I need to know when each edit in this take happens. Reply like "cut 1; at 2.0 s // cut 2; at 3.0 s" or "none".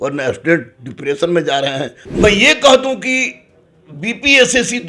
cut 1; at 2.0 s